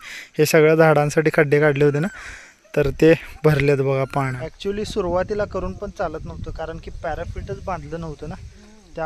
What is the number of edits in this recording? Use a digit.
1